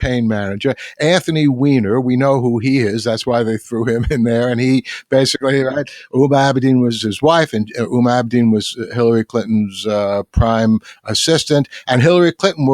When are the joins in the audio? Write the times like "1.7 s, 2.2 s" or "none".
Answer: 7.0 s